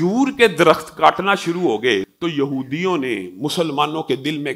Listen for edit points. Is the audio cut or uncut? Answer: cut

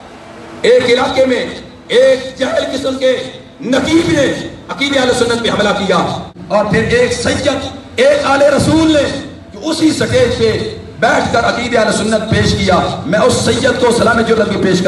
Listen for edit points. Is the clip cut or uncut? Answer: cut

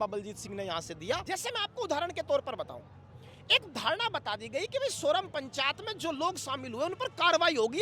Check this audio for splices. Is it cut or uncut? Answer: cut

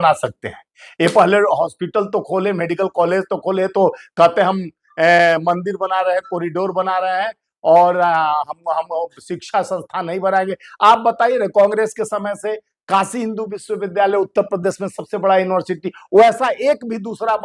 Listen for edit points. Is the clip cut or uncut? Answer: uncut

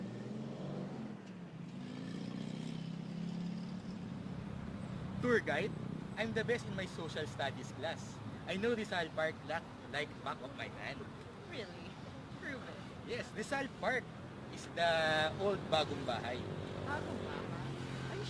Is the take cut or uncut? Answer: cut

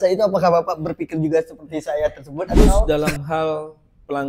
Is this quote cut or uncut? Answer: cut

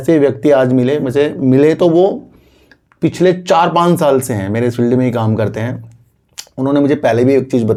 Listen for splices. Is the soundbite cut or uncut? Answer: uncut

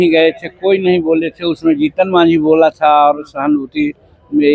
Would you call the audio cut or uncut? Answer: uncut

